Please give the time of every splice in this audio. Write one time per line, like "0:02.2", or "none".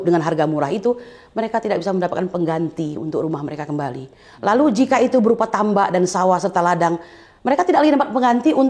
none

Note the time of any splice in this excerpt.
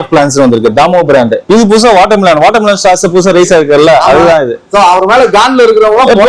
0:01.5

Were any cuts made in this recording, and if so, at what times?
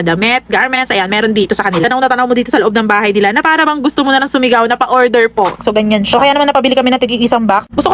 0:01.8
0:05.6

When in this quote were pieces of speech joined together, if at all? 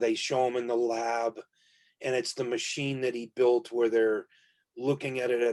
none

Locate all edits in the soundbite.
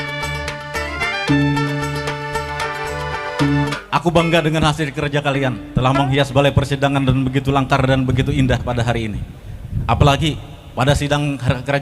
0:03.7

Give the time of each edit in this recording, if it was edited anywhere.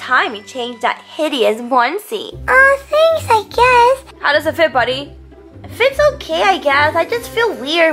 0:04.1

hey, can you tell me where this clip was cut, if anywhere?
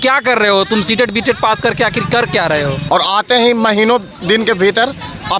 0:02.8

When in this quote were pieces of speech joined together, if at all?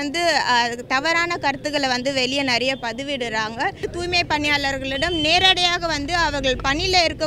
0:03.8

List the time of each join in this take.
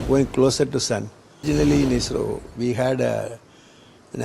0:01.4

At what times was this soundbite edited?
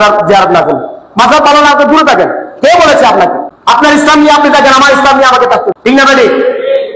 0:03.5
0:05.7

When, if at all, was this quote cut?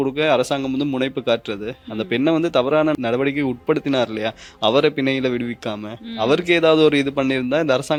none

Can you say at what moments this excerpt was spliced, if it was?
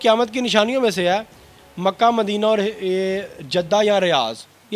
none

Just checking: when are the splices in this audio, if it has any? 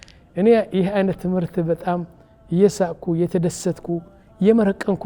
none

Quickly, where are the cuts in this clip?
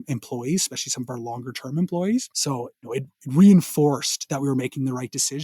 0:02.6

